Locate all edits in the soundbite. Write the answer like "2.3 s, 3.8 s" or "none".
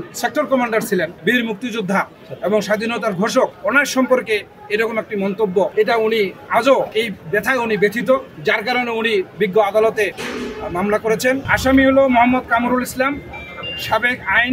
1.2 s, 2.2 s, 3.6 s, 5.7 s, 6.9 s, 8.3 s, 10.2 s, 11.5 s